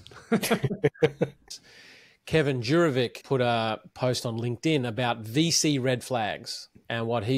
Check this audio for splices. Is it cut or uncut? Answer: cut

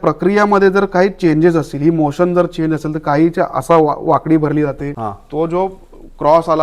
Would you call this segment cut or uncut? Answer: cut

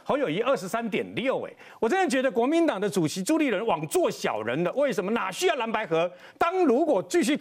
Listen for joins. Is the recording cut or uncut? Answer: cut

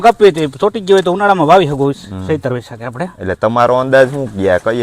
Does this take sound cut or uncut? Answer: uncut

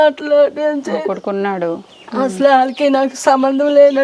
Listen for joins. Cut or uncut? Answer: cut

